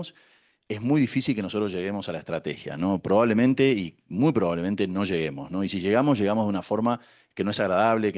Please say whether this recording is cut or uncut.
uncut